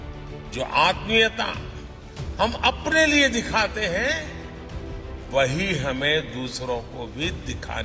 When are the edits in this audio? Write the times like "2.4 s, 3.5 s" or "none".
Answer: none

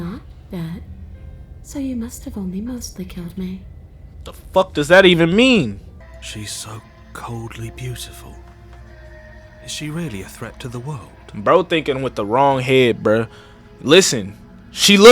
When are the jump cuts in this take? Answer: 6.0 s

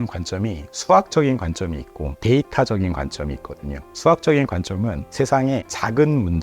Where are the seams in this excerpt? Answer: 3.8 s

